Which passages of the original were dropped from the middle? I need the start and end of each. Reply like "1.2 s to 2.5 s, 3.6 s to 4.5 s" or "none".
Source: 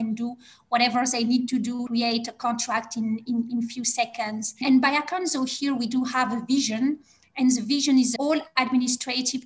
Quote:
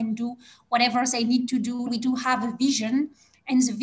1.9 s to 5.8 s